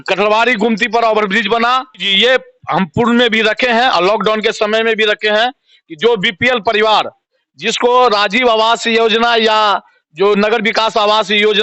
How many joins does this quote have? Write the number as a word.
one